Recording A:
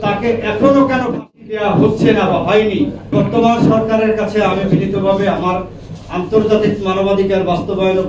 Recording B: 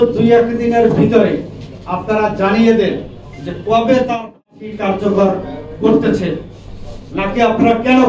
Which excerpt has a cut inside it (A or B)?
A